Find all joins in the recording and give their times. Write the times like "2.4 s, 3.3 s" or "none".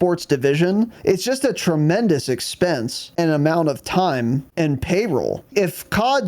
0.9 s, 3.0 s, 4.5 s, 5.5 s